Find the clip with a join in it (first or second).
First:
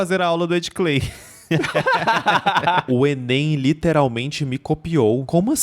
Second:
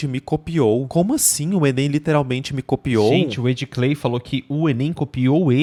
first